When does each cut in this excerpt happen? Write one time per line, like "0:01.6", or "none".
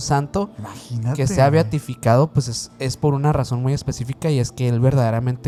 none